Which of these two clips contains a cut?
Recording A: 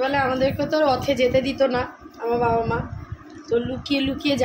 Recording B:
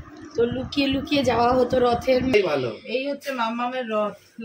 B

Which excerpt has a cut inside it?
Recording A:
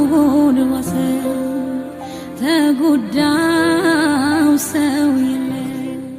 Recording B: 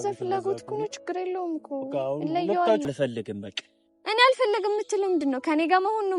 B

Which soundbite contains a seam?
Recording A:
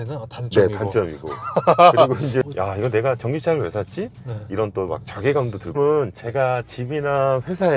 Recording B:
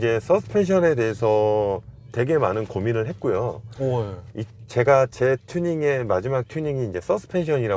A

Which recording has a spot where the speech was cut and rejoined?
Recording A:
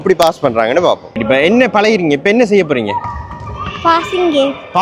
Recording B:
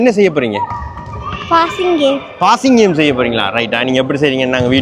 A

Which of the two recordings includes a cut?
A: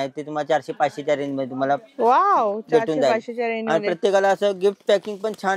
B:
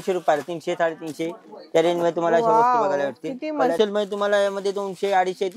B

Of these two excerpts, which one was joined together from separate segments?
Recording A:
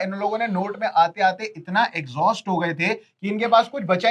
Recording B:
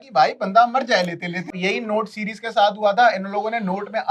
B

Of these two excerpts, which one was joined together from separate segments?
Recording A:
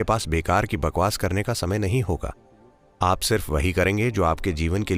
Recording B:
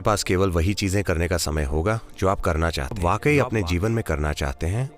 B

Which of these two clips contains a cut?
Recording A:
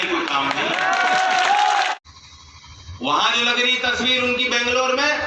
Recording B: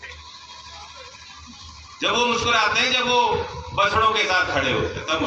A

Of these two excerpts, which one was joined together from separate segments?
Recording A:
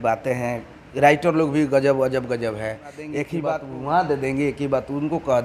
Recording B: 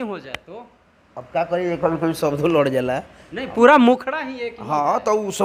A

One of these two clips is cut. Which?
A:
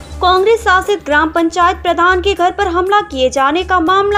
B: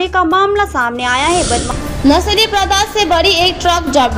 B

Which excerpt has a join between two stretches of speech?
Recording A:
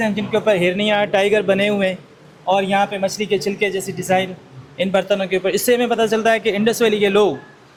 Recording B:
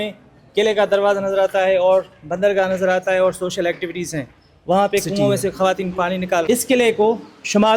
B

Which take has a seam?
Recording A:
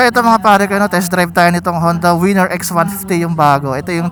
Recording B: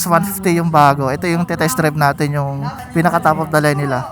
B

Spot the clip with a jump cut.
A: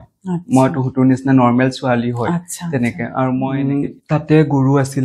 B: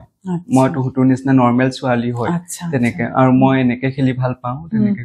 A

